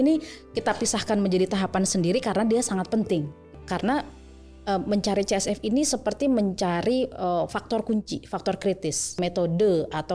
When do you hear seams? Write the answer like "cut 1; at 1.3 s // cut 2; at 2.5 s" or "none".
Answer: cut 1; at 3.5 s // cut 2; at 9.2 s